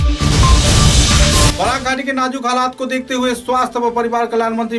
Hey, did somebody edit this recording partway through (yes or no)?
yes